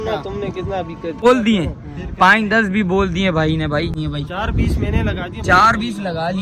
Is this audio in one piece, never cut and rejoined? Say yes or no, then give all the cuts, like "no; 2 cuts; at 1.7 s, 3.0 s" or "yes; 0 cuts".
no; 2 cuts; at 1.2 s, 4.0 s